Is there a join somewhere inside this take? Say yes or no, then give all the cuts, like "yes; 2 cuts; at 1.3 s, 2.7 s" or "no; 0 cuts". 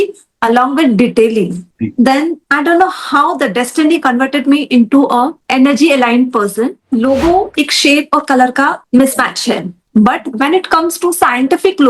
yes; 1 cut; at 6.8 s